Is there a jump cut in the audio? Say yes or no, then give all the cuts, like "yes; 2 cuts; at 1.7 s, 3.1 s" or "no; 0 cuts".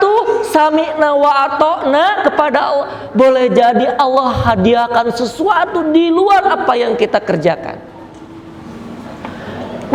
no; 0 cuts